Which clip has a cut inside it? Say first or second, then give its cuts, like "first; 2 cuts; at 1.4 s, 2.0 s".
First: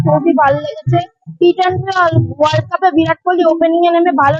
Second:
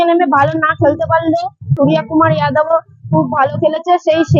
second; 1 cut; at 1.7 s